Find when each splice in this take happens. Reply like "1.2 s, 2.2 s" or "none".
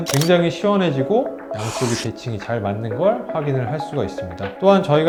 none